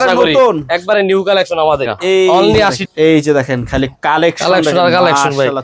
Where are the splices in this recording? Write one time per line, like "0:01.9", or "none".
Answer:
0:02.8